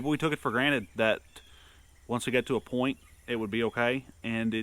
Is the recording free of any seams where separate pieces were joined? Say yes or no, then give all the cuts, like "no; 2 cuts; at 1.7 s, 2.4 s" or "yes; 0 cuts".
yes; 0 cuts